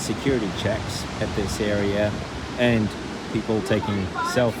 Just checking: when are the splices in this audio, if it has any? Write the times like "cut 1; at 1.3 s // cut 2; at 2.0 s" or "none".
none